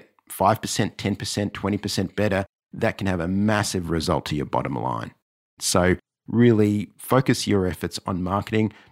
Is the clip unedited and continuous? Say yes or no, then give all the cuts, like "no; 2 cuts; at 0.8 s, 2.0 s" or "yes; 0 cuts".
no; 1 cut; at 5.6 s